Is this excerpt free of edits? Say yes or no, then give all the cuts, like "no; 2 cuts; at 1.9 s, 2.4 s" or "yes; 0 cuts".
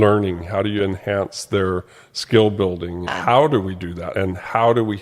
no; 2 cuts; at 3.1 s, 4.1 s